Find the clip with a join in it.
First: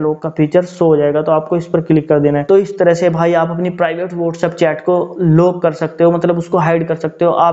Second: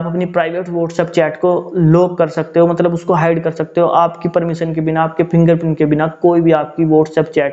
first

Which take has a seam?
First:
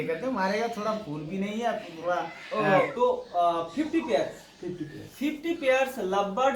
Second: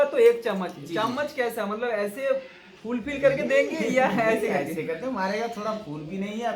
first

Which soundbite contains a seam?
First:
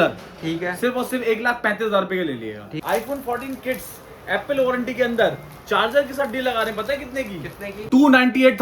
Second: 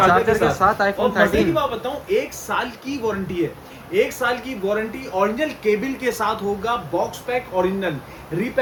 first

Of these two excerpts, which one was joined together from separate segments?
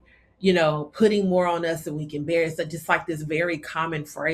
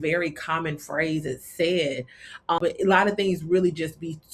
second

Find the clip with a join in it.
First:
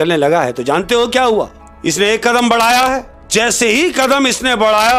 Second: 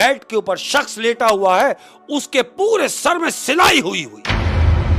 first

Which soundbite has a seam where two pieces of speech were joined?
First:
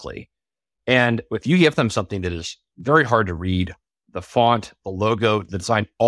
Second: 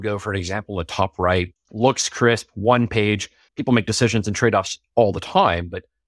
second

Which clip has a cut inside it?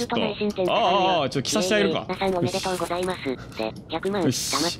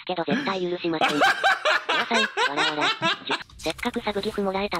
second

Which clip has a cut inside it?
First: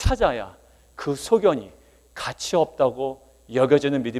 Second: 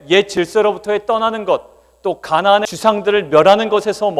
second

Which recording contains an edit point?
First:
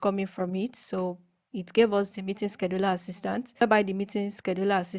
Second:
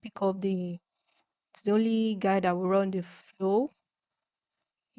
first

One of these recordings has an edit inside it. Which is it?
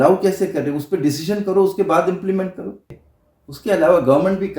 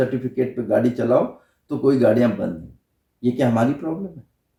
first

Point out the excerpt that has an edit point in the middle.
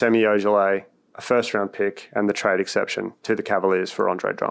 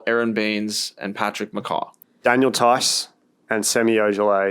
second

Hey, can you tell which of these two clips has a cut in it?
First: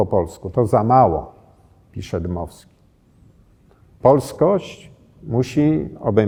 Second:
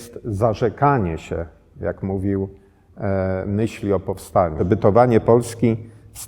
second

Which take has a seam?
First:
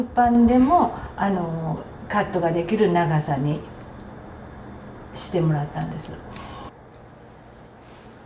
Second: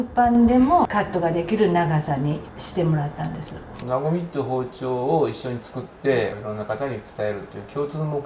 second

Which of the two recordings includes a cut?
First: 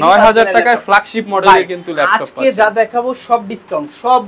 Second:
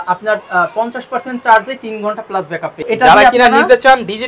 second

